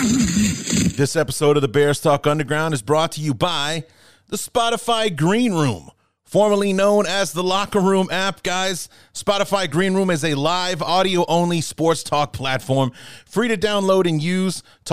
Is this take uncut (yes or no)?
no